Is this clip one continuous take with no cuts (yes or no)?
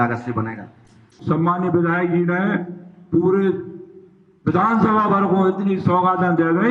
no